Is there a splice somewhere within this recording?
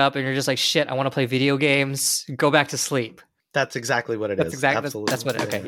no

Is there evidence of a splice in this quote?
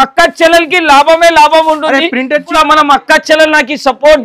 yes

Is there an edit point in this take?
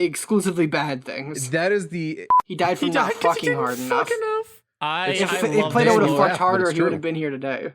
yes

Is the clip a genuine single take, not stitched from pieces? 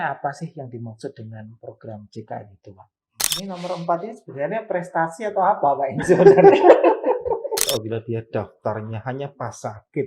no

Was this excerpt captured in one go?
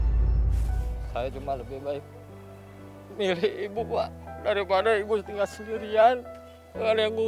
no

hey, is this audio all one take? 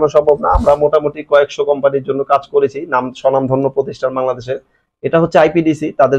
yes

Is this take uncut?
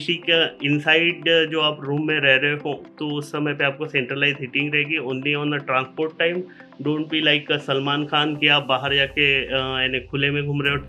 yes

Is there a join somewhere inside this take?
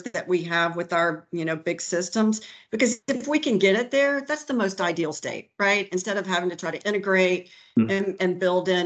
no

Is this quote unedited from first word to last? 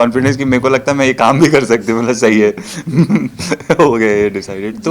yes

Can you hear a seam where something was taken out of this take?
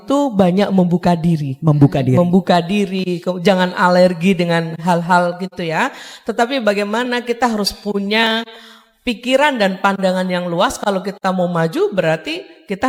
no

